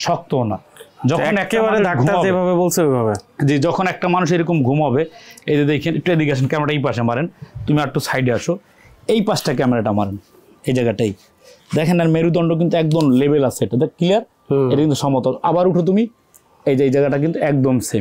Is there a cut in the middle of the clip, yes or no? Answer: no